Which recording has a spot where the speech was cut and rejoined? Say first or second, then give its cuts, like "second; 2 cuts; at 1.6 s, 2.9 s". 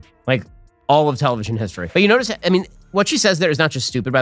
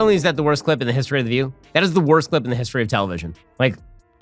first; 1 cut; at 1.8 s